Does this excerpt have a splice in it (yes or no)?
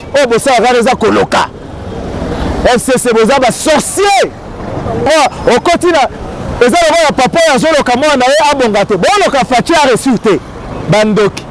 no